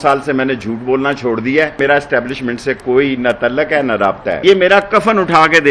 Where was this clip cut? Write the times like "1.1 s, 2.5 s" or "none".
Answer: 1.8 s, 4.4 s